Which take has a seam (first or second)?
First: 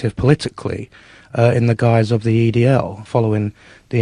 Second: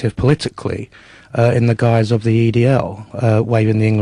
first